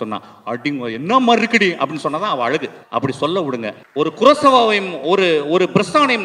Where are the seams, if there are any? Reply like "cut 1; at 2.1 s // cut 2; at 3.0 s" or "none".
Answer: cut 1; at 2.8 s // cut 2; at 3.8 s